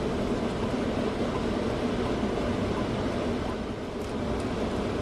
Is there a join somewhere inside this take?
no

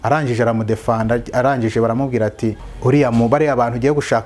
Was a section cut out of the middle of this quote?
yes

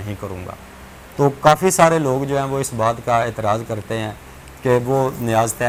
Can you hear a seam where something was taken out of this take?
no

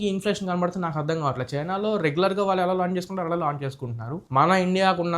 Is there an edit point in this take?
yes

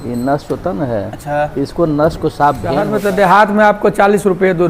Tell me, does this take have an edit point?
yes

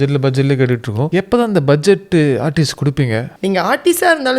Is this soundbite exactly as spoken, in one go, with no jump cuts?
no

